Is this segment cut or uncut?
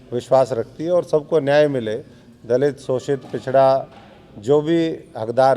uncut